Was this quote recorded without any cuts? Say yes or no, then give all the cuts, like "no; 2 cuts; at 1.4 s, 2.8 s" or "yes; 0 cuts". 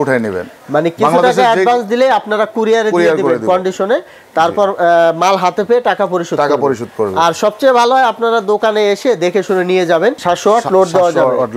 no; 1 cut; at 10.2 s